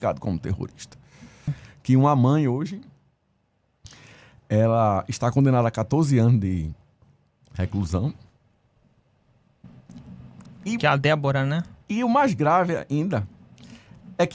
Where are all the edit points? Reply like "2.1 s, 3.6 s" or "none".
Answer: 1.5 s